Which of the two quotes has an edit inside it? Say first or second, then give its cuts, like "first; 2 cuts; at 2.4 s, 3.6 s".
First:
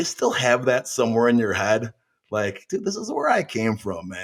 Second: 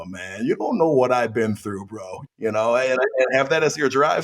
second; 1 cut; at 2.4 s